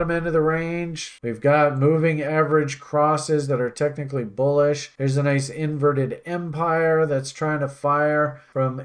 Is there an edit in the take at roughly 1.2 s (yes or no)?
yes